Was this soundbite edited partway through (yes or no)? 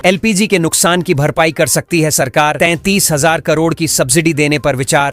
no